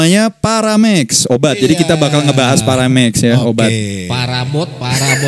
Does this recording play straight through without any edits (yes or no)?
no